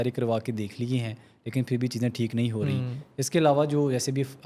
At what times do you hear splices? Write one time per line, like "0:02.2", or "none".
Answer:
none